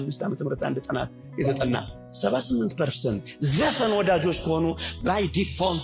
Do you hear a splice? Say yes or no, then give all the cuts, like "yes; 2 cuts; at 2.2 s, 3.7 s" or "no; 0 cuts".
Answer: no; 0 cuts